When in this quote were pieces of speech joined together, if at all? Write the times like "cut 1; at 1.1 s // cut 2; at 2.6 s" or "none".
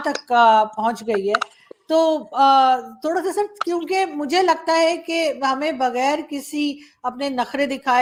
none